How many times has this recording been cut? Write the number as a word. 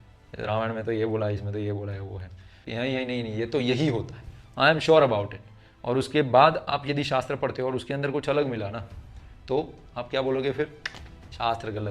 one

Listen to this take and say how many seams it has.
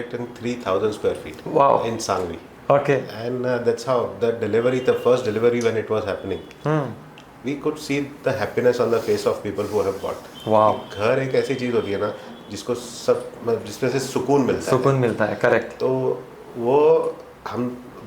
one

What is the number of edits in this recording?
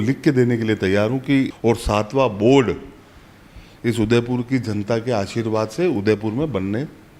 one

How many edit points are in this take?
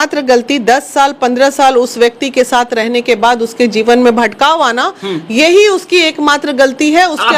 zero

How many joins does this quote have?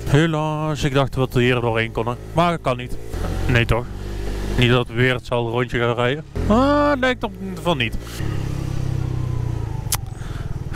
zero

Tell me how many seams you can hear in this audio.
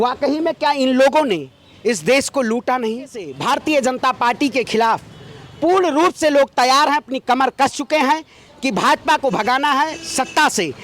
one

